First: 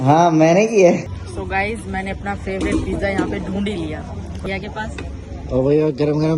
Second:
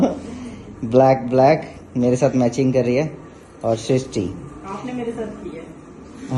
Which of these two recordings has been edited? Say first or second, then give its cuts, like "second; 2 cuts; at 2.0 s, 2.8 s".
first; 2 cuts; at 1.1 s, 4.5 s